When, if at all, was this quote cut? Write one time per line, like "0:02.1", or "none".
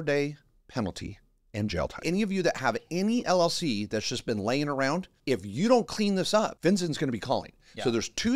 0:02.0
0:05.1
0:06.5